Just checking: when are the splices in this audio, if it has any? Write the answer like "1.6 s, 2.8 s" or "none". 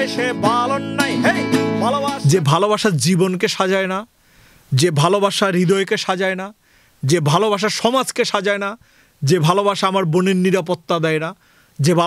2.1 s